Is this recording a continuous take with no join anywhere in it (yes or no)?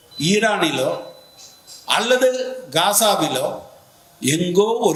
yes